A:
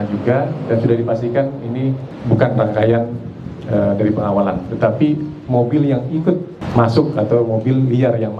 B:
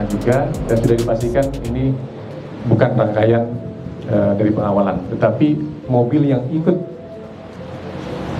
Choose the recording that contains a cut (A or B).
A